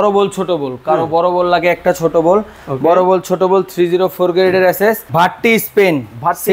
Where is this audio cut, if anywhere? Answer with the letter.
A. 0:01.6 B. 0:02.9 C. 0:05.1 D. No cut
C